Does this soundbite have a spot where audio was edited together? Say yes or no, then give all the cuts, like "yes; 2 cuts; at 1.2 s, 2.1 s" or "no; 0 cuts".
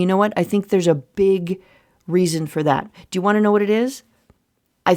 no; 0 cuts